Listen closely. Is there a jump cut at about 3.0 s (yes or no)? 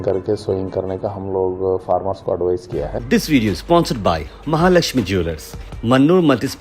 yes